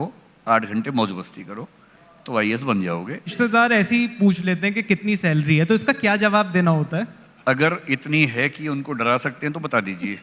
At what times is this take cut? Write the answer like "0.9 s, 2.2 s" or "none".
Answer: 3.3 s, 7.2 s